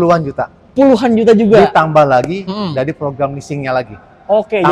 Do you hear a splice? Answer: no; 0 cuts

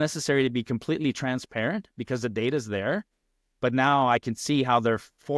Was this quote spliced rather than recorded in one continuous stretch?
no; 0 cuts

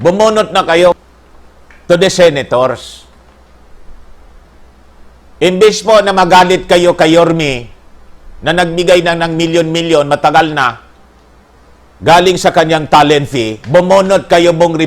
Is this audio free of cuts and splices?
no; 1 cut; at 0.9 s

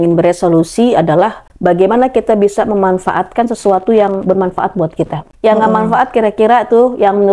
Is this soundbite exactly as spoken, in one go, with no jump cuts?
no; 2 cuts; at 1.5 s, 5.2 s

